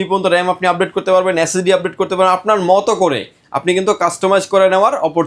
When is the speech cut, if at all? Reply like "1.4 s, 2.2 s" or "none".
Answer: none